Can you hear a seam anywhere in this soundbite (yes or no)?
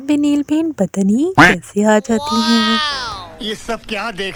no